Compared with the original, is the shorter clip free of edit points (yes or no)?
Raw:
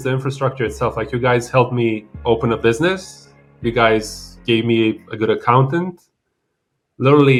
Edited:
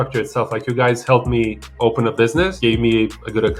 no